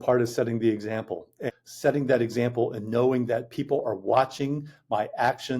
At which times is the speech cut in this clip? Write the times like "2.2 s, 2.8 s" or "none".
1.5 s